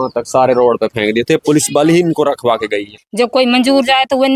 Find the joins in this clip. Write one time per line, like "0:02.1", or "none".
0:02.9